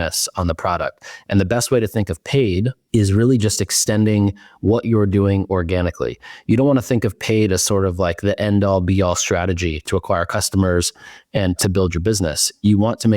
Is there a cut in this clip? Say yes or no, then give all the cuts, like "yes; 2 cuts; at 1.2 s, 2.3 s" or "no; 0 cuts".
yes; 2 cuts; at 2.8 s, 11.6 s